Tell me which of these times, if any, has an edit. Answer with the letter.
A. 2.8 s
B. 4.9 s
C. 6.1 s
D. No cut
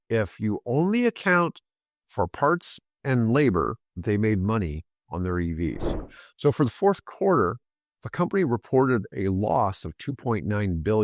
C